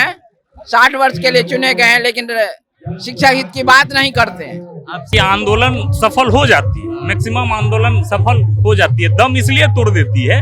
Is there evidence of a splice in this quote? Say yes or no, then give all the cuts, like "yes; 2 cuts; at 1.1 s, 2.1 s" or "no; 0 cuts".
yes; 1 cut; at 5.1 s